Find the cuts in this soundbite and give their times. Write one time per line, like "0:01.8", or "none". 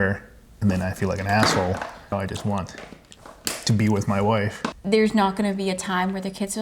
0:02.1
0:04.7